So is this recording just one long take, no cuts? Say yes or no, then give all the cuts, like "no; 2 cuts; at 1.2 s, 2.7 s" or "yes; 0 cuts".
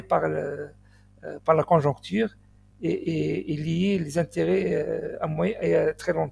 yes; 0 cuts